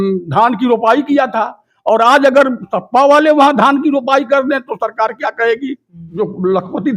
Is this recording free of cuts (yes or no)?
no